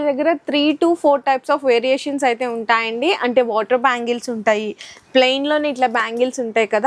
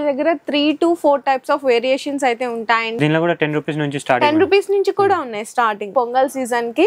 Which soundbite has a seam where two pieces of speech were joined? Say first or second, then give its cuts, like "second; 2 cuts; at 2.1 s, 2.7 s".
second; 2 cuts; at 2.9 s, 5.8 s